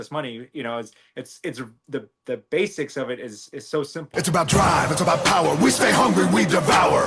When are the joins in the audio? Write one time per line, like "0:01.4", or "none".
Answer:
0:04.0